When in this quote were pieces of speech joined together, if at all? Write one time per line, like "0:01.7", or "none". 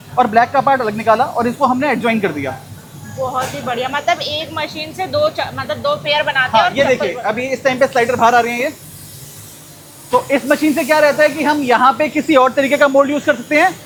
none